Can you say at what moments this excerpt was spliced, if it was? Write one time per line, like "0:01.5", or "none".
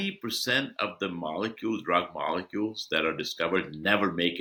none